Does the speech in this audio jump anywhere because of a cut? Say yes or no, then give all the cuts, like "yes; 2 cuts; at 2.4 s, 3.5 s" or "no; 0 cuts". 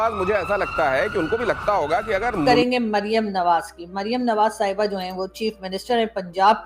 yes; 1 cut; at 2.4 s